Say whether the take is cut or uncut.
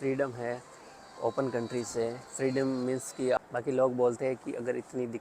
cut